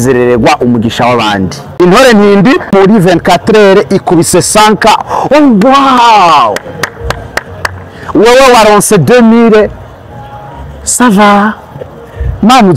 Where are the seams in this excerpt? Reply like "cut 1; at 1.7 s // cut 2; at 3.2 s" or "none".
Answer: cut 1; at 1.6 s // cut 2; at 2.7 s